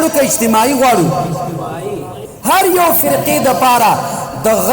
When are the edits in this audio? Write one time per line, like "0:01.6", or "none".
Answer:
0:02.1